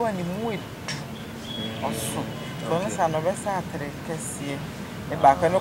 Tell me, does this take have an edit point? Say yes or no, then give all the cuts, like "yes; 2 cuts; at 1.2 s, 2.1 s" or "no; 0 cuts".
no; 0 cuts